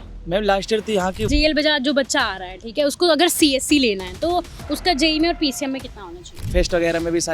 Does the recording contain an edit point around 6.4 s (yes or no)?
yes